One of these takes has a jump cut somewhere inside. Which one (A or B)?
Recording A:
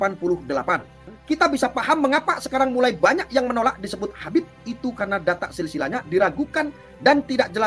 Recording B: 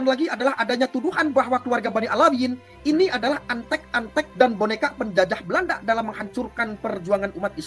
A